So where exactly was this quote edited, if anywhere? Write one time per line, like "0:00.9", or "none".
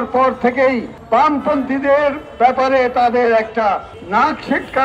0:00.9
0:03.9